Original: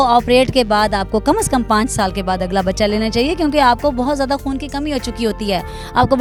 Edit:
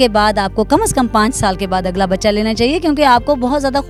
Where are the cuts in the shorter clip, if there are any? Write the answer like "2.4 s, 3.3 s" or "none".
none